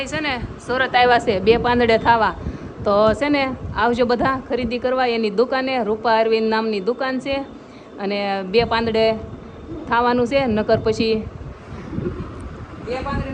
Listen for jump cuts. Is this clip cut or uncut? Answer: uncut